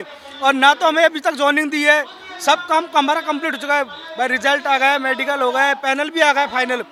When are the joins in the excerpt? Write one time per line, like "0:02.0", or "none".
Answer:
none